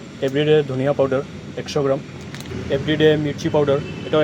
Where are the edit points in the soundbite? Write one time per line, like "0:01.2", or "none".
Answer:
0:02.2